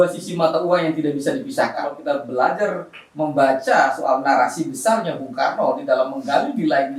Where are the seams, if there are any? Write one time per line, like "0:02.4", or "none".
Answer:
0:01.9